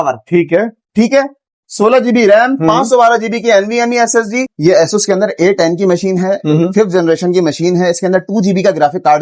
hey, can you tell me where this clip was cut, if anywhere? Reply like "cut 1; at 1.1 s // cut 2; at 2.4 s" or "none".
cut 1; at 4.5 s